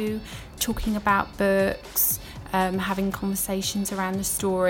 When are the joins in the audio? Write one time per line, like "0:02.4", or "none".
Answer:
none